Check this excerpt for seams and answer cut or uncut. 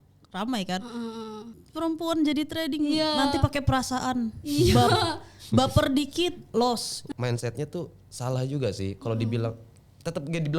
cut